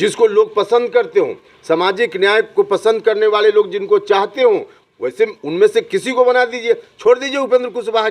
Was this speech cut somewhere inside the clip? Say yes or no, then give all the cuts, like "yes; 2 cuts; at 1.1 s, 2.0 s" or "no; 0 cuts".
no; 0 cuts